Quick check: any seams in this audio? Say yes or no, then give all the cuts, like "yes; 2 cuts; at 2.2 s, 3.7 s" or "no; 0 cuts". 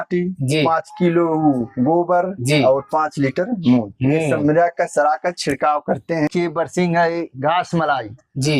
yes; 1 cut; at 6.3 s